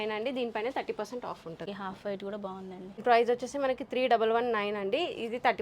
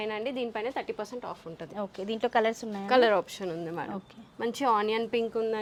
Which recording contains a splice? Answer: first; 2 cuts; at 1.6 s, 3.0 s

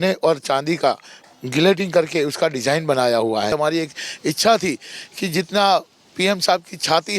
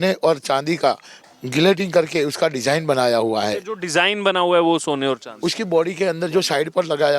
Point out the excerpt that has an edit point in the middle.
first; 1 cut; at 3.5 s

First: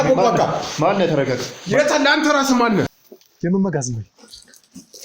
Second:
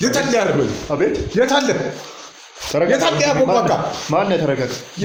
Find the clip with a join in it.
first; 1 cut; at 2.9 s

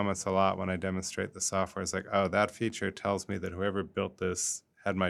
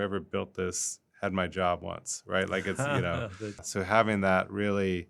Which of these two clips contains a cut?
second; 1 cut; at 3.7 s

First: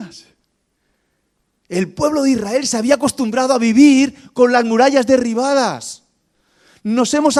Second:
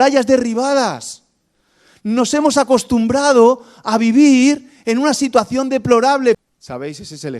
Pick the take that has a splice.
second; 1 cut; at 6.4 s

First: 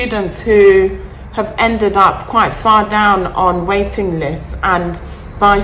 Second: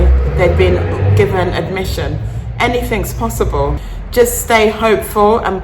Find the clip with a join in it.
second; 1 cut; at 3.8 s

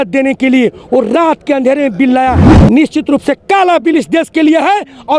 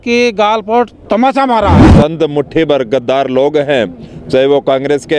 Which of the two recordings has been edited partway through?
second; 1 cut; at 1.8 s

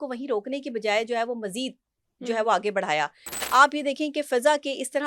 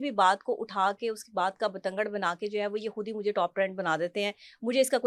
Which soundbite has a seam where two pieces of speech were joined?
first; 1 cut; at 3.3 s

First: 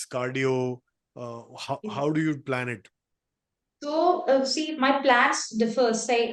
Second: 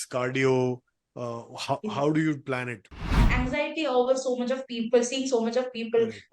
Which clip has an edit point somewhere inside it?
second; 1 cut; at 3.3 s

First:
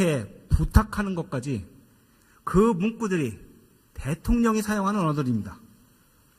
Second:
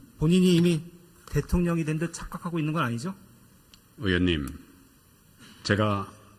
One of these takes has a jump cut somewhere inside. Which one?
first; 1 cut; at 3.0 s

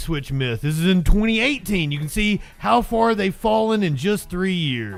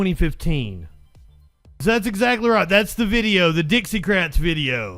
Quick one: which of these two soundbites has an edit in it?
second; 1 cut; at 1.8 s

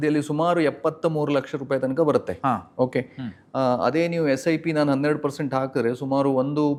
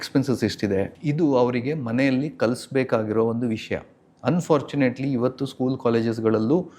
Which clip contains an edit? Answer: second; 1 cut; at 1.0 s

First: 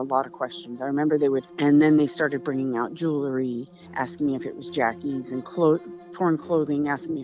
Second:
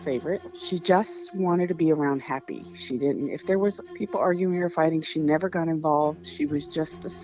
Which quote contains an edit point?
first; 1 cut; at 1.5 s

